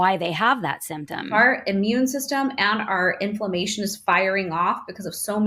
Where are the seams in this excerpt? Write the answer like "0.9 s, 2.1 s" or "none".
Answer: 1.3 s